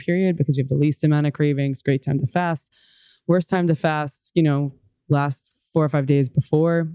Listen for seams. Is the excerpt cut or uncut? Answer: uncut